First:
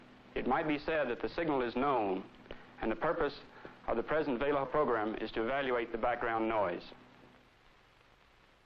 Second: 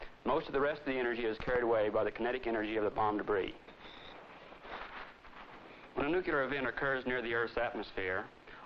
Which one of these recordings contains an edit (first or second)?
second